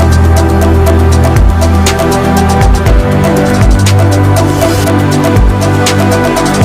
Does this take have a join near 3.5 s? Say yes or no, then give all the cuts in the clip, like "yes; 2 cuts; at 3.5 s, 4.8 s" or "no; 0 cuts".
no; 1 cut; at 1.9 s